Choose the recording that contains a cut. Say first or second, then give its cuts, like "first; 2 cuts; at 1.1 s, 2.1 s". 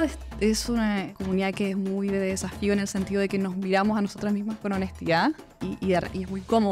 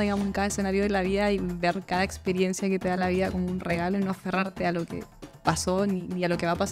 first; 2 cuts; at 1.1 s, 5.7 s